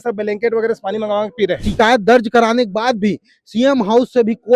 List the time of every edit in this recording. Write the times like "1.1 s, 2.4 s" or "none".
1.6 s